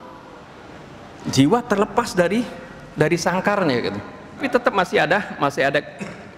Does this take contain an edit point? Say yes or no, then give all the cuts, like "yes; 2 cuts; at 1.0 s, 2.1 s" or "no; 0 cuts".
yes; 1 cut; at 4.4 s